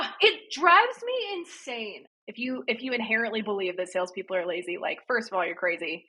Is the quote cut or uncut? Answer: cut